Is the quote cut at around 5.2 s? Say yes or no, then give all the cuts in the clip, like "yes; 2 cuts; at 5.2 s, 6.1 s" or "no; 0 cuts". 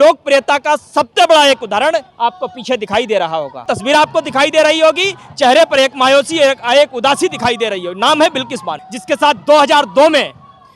no; 2 cuts; at 3.6 s, 8.9 s